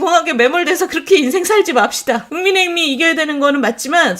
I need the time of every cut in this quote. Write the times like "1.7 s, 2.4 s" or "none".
2.3 s